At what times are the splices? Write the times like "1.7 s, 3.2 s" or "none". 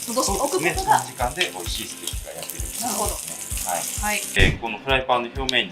4.3 s